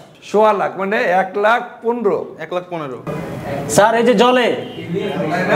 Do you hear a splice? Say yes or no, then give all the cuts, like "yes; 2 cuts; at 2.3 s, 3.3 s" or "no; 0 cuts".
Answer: yes; 1 cut; at 3.0 s